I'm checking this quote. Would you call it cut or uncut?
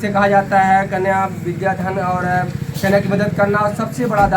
uncut